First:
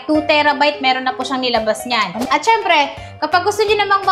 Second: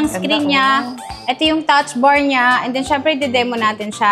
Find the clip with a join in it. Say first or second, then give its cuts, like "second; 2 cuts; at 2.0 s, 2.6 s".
first; 1 cut; at 2.2 s